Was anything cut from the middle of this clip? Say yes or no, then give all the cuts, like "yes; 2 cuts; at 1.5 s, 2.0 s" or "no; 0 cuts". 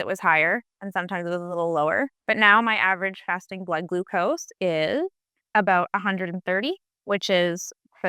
no; 0 cuts